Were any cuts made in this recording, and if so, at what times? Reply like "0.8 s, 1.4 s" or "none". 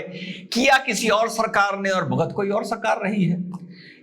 none